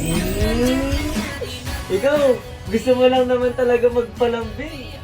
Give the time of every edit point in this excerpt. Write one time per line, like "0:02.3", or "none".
none